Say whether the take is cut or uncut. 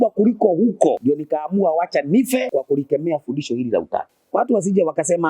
cut